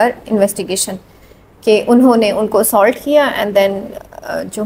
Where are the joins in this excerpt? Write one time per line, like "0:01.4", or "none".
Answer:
none

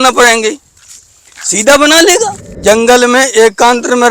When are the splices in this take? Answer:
0:02.6

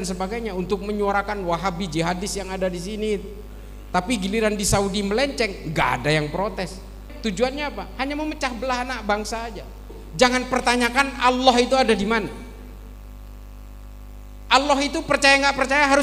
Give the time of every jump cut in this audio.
0:07.1
0:09.9

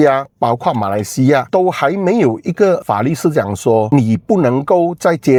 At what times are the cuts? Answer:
none

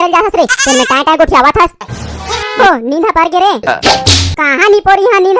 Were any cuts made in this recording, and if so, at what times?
0:02.6

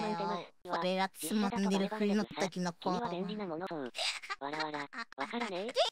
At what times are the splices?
0:03.7

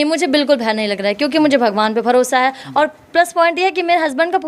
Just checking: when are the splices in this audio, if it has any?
none

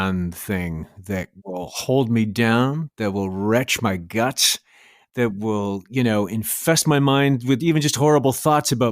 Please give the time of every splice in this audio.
0:01.4
0:06.6

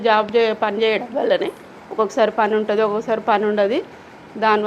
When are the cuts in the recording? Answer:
none

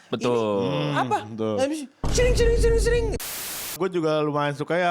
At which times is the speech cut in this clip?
0:03.2

